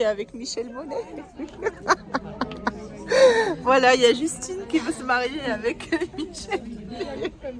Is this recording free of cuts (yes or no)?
yes